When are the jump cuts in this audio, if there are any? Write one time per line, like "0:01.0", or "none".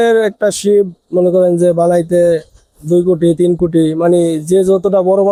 none